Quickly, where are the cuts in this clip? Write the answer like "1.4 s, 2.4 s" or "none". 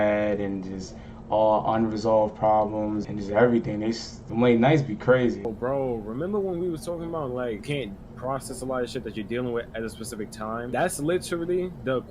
3.1 s, 4.1 s, 5.5 s, 7.6 s, 10.7 s